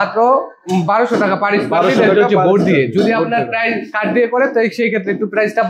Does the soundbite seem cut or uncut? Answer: uncut